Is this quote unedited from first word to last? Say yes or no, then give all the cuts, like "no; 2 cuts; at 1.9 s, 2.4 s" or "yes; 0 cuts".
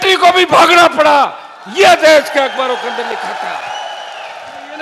yes; 0 cuts